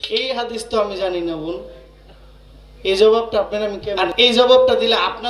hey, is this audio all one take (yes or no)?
no